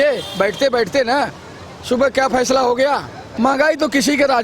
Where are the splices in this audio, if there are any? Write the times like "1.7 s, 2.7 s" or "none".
3.3 s